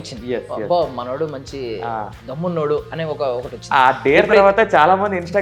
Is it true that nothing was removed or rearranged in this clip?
yes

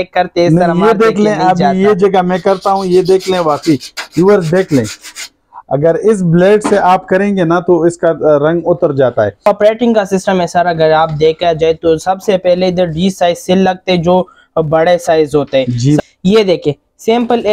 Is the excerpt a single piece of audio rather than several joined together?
no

